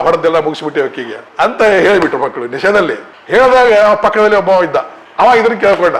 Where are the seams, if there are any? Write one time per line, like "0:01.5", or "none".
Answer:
none